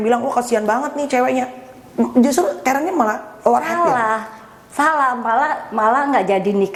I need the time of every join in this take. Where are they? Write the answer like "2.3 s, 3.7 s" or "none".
none